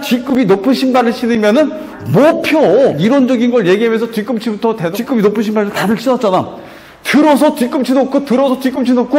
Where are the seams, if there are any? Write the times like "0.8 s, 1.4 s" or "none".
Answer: 3.0 s, 4.9 s